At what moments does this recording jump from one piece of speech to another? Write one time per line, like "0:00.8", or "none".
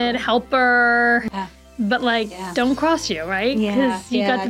0:01.3